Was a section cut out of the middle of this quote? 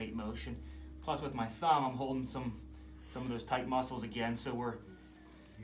no; 0 cuts

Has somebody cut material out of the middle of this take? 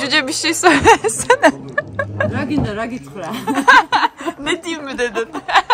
no; 0 cuts

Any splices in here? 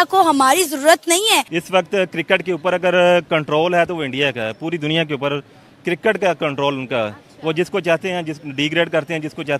yes; 1 cut; at 1.6 s

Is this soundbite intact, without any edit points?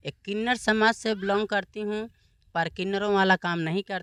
yes; 0 cuts

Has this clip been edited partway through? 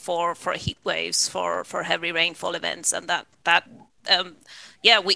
no; 0 cuts

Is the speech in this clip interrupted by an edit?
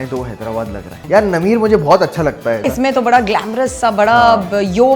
yes; 2 cuts; at 0.9 s, 2.7 s

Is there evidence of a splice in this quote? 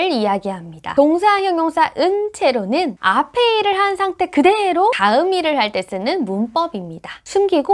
yes; 1 cut; at 5.0 s

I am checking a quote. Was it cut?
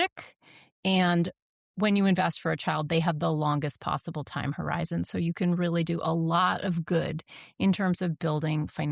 no; 0 cuts

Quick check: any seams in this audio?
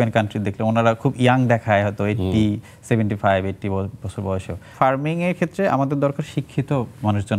yes; 1 cut; at 4.7 s

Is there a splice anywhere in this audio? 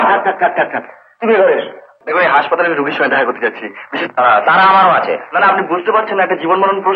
yes; 1 cut; at 1.9 s

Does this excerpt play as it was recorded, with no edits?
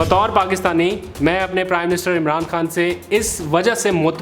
yes; 0 cuts

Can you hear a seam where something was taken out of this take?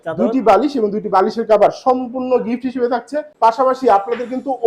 yes; 1 cut; at 3.3 s

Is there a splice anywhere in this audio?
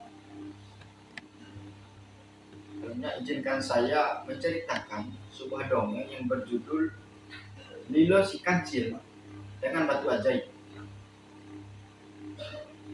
yes; 1 cut; at 2.1 s

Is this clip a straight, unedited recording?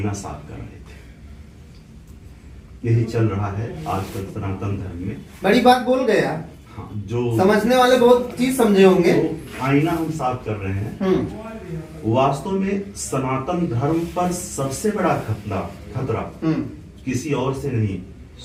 yes; 0 cuts

